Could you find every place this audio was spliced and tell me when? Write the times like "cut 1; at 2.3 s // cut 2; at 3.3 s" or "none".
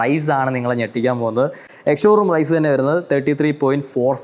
none